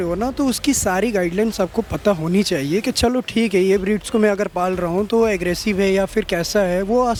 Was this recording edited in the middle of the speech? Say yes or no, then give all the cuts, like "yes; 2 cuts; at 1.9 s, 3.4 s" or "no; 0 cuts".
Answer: no; 0 cuts